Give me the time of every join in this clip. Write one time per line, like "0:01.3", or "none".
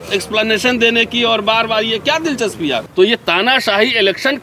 0:02.9